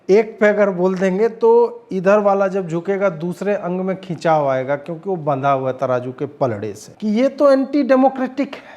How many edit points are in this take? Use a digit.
1